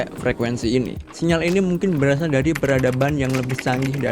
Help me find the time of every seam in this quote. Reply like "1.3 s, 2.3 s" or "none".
1.0 s